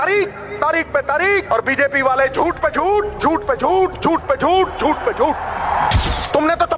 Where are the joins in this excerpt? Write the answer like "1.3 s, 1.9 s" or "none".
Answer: 1.5 s, 6.0 s